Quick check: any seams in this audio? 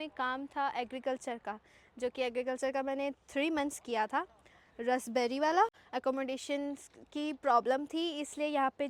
yes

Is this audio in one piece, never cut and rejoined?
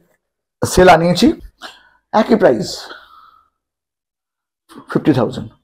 no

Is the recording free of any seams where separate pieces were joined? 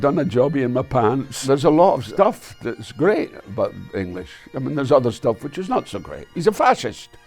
no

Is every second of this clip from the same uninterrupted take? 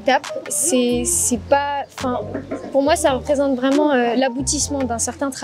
yes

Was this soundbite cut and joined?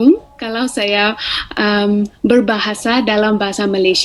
no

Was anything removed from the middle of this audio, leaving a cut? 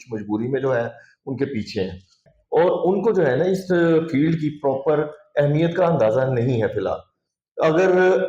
yes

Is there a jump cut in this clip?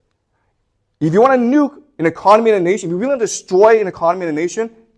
no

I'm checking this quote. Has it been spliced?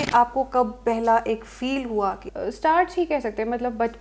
yes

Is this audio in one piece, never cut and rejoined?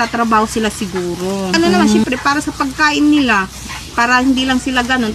no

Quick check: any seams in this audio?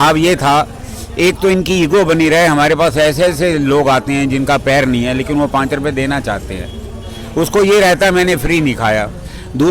no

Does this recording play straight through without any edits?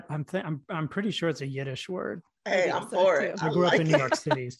no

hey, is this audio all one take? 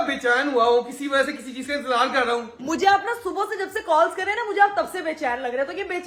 yes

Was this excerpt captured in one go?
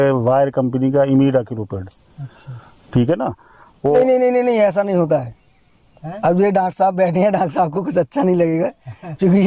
no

